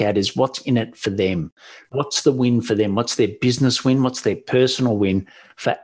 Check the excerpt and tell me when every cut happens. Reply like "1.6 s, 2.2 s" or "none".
none